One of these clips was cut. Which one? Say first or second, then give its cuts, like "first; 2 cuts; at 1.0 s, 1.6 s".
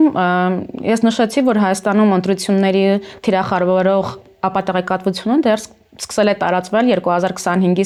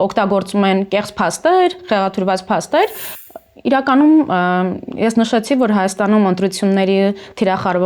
second; 1 cut; at 3.1 s